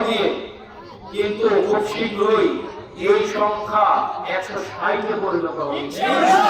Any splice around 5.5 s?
no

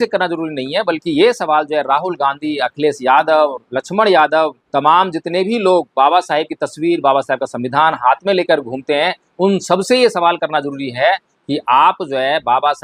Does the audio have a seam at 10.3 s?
no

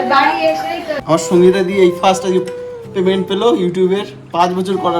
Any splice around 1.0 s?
yes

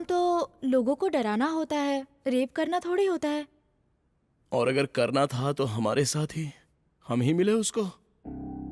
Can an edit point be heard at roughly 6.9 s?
no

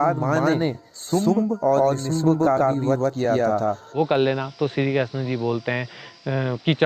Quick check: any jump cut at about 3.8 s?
yes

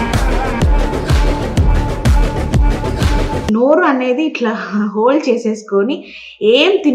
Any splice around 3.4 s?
yes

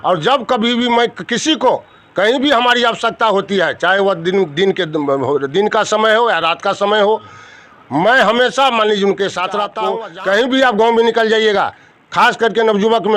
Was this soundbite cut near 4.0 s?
no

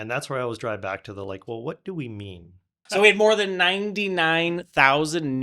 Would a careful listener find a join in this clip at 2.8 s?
yes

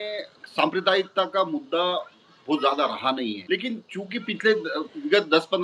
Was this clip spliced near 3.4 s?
yes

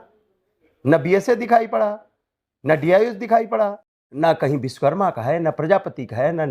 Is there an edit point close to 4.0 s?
yes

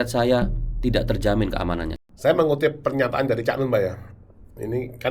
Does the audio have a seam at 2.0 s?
yes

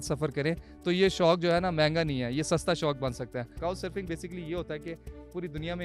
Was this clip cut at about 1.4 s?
no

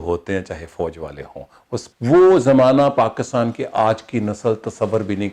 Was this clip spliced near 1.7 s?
yes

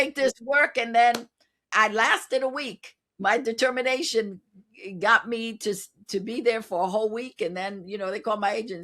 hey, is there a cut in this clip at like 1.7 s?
yes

